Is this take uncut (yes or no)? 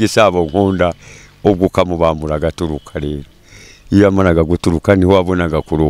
yes